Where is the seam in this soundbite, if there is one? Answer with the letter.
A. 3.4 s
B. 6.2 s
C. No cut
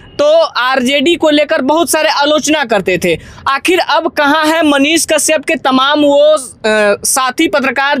C